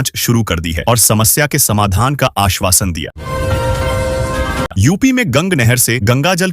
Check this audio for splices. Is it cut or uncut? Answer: cut